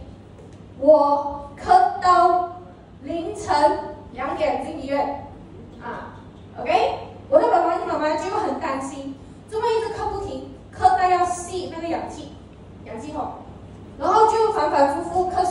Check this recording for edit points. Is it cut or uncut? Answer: uncut